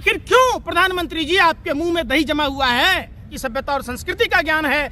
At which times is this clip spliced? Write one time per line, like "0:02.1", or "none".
0:03.4